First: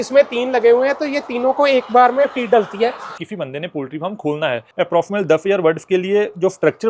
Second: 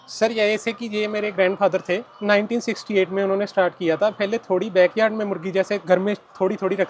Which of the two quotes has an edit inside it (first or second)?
first